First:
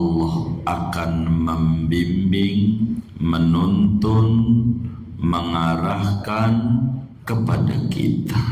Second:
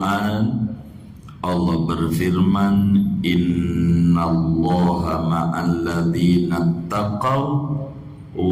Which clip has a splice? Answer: first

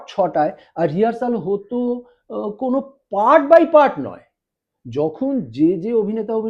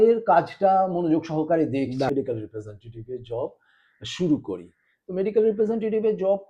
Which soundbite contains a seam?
second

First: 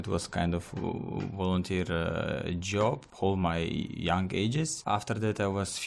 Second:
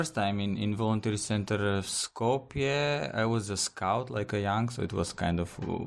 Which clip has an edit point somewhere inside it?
first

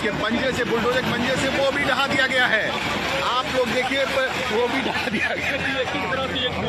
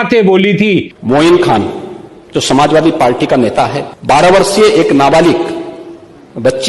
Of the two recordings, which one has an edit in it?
second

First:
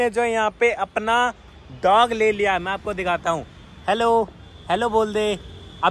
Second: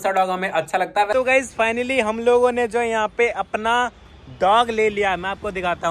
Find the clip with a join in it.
second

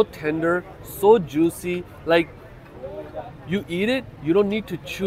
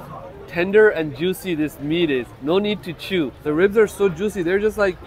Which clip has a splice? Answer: second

